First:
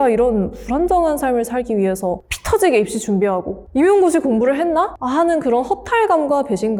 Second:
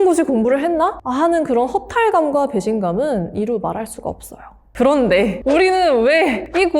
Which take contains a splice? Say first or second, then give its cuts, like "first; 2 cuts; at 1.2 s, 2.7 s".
second; 1 cut; at 4.6 s